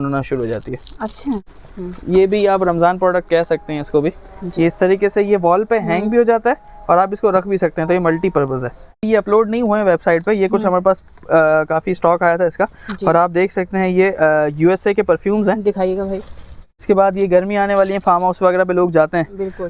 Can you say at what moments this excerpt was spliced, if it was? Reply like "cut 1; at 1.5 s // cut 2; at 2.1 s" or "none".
cut 1; at 1.5 s // cut 2; at 9.0 s // cut 3; at 16.8 s